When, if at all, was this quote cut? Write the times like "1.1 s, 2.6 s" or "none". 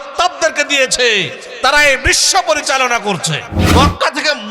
3.6 s